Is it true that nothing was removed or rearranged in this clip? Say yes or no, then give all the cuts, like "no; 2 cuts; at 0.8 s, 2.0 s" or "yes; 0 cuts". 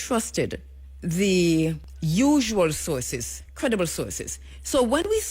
no; 1 cut; at 1.9 s